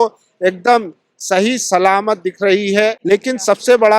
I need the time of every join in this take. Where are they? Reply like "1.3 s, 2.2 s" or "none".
3.0 s